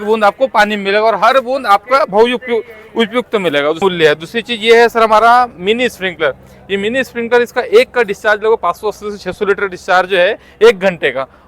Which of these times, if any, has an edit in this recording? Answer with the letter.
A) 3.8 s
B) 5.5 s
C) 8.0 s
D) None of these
A